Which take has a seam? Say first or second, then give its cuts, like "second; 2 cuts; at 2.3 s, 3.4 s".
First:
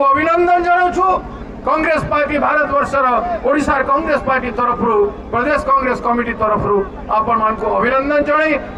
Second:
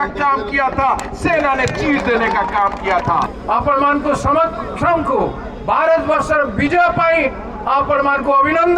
second; 1 cut; at 3.3 s